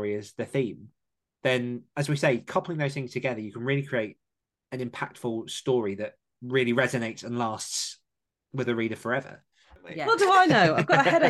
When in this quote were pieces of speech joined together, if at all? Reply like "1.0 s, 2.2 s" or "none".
9.9 s